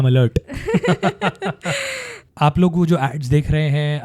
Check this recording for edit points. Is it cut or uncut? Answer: uncut